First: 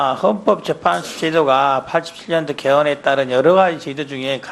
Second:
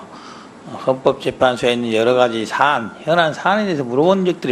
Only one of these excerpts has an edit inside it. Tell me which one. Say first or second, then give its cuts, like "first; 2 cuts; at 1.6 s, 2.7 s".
second; 1 cut; at 1.7 s